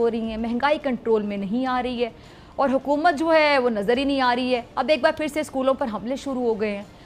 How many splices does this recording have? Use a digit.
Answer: 0